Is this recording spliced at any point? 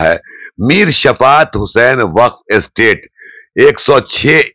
no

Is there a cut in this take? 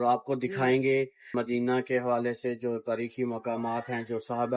yes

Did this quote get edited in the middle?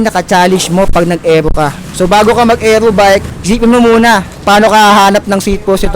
yes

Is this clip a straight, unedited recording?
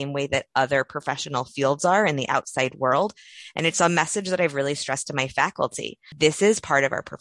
no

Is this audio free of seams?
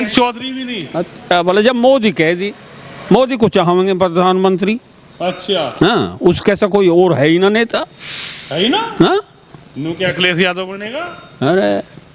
yes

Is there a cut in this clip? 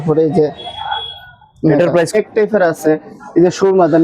yes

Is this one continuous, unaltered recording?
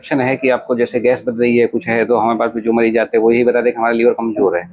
yes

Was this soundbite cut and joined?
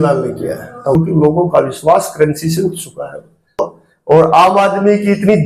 yes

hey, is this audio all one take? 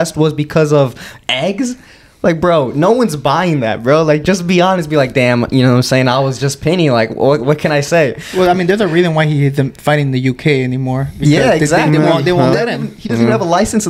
yes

